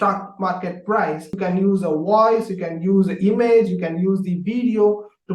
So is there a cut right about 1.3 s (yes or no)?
yes